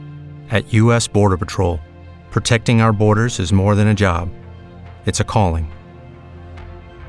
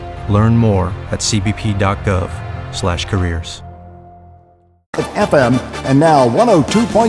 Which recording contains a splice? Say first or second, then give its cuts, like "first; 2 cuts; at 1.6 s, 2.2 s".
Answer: second; 1 cut; at 5.0 s